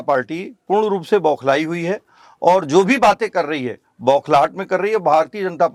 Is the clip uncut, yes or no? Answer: yes